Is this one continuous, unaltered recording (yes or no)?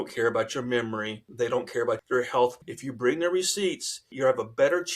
no